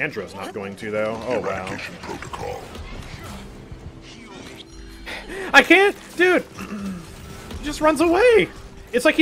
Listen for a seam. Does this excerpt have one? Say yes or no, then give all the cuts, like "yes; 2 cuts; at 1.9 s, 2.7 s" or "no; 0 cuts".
no; 0 cuts